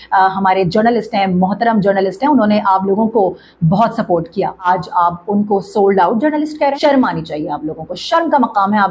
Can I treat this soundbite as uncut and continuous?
no; 2 cuts; at 4.6 s, 6.8 s

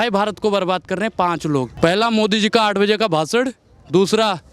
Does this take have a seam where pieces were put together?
yes; 1 cut; at 1.7 s

